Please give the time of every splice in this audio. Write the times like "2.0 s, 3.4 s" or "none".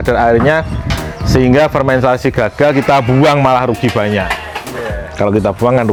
none

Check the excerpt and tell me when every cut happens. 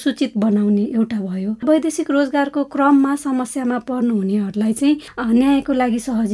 1.6 s

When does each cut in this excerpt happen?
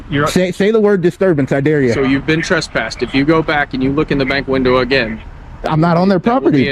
2.0 s

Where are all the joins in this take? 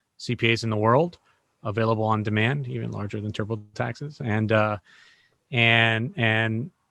none

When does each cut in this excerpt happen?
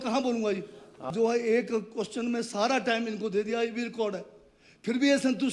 1.1 s

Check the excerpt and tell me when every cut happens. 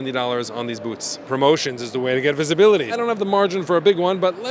1.2 s, 2.9 s

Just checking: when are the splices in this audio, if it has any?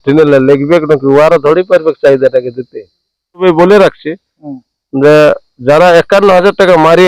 3.4 s

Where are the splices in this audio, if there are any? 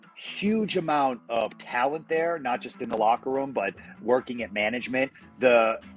1.2 s

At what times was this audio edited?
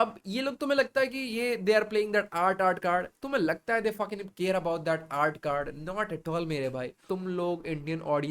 7.0 s

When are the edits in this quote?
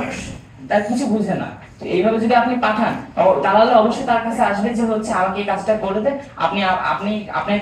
none

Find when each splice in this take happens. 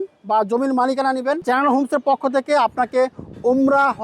1.4 s

